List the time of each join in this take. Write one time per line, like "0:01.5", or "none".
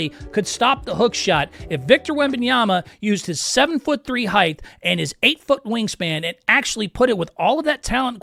none